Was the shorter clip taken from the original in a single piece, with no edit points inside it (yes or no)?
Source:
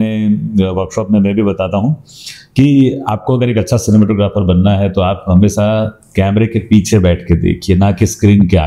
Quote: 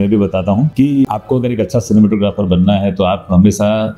no